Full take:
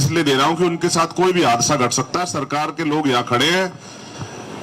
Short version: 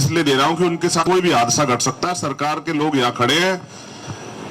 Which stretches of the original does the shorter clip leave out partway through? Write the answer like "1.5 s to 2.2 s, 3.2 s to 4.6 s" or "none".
1.0 s to 1.1 s

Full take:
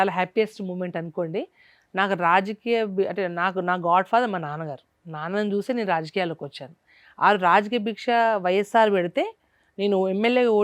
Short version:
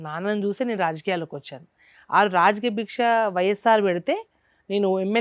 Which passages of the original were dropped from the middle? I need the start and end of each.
none

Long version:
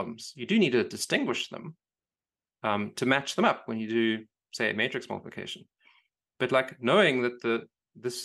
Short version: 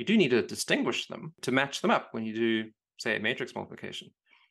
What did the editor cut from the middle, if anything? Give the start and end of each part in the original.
1.8 s to 2.9 s

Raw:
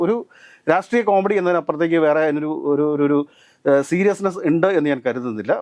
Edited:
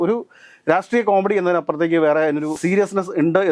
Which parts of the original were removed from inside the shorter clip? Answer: 2.6 s to 3.9 s

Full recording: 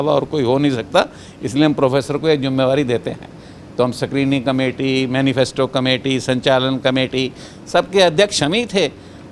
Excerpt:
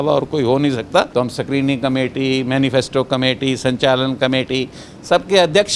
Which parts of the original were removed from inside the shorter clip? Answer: 1.1 s to 3.7 s

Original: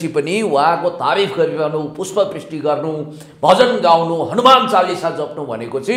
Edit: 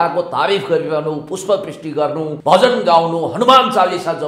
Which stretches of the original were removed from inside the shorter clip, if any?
3.0 s to 3.3 s

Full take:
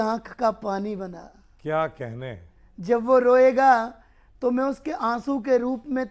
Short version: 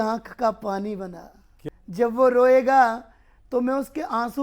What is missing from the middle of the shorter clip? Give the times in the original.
1.5 s to 2.4 s

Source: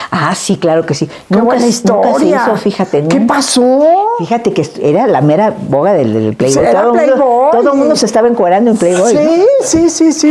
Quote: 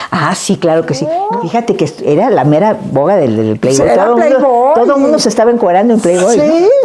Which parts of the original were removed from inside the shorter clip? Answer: 1.2 s to 4.0 s

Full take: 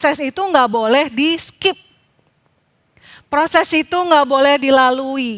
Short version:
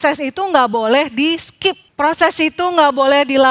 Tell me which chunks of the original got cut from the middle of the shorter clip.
1.9 s to 3.2 s

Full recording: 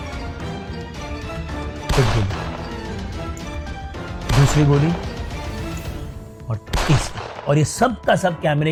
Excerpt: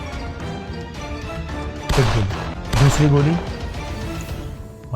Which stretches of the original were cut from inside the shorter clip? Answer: 2.6 s to 4.1 s

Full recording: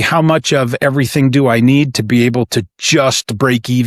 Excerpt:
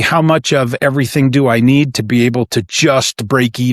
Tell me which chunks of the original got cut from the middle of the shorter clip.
2.7 s to 2.8 s

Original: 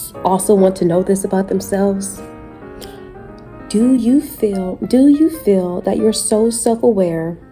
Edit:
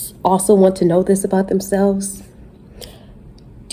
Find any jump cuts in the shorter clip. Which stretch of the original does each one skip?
none

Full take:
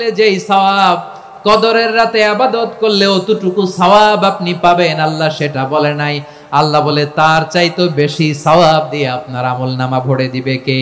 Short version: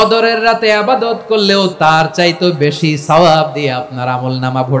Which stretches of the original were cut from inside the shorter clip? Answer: 3.2 s to 7.1 s

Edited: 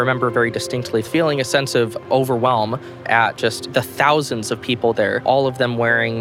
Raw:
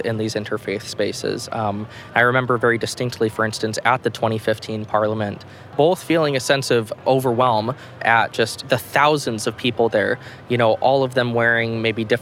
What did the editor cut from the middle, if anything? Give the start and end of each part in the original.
3.3 s to 6.0 s, 10.2 s to 10.8 s

